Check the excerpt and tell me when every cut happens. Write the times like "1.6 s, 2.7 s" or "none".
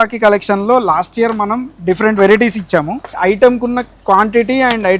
3.1 s